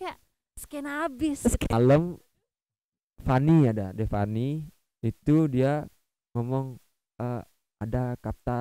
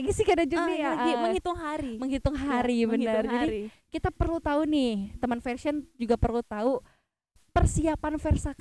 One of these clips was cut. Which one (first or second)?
first